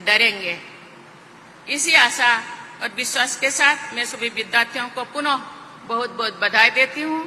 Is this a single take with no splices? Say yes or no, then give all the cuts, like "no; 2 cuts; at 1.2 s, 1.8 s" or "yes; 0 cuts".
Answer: yes; 0 cuts